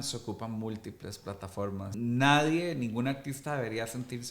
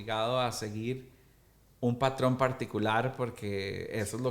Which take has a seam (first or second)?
first